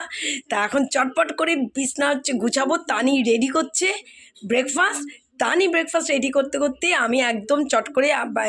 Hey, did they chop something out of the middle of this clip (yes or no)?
no